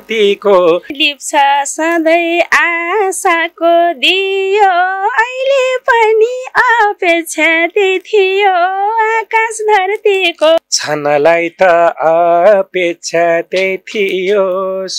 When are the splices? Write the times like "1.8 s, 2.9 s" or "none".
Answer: 1.0 s, 10.6 s